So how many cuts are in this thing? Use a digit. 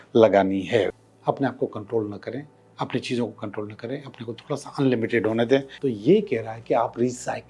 2